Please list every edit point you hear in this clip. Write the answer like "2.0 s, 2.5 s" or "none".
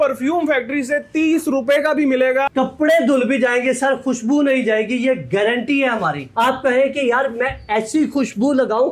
2.5 s, 6.2 s